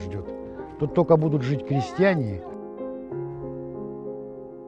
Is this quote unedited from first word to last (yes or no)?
no